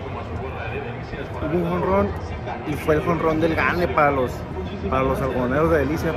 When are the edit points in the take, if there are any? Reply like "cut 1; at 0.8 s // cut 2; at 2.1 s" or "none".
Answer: none